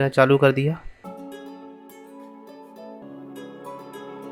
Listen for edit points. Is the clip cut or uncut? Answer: cut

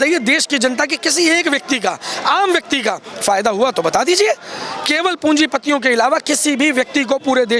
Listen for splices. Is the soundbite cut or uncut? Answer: uncut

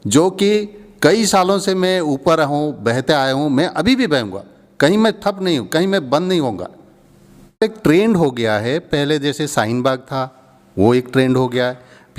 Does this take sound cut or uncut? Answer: cut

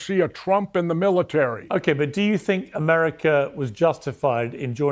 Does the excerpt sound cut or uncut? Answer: cut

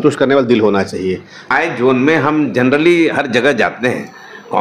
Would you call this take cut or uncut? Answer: cut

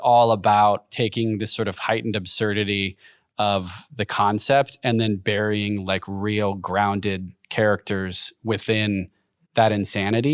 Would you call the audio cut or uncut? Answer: cut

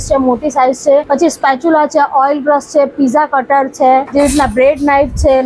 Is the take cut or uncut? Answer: cut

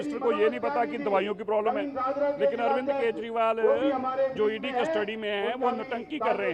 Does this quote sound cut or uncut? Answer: uncut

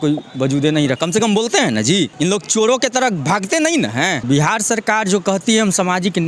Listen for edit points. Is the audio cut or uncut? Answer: cut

